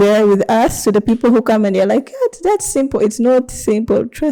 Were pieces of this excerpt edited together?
no; 0 cuts

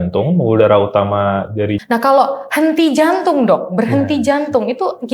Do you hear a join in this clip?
yes; 1 cut; at 1.8 s

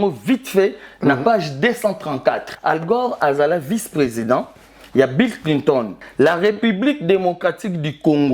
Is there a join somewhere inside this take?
yes; 2 cuts; at 2.5 s, 6.0 s

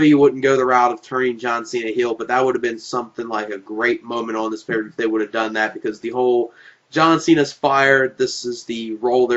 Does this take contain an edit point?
yes; 1 cut; at 1.3 s

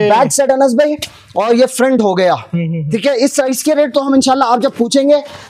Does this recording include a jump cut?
no; 0 cuts

